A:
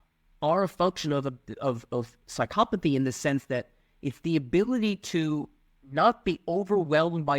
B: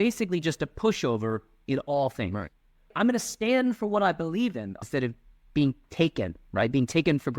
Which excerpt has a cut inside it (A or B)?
B